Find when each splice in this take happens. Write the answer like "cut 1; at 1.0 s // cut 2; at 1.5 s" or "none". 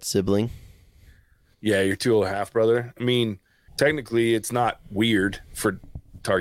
cut 1; at 3.6 s